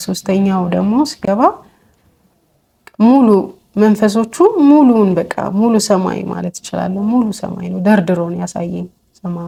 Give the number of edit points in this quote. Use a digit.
0